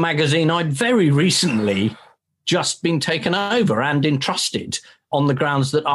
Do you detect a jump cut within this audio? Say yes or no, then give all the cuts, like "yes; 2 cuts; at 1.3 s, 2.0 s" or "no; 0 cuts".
no; 0 cuts